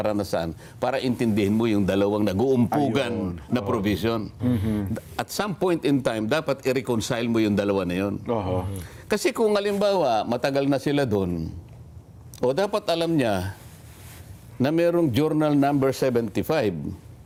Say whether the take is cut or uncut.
uncut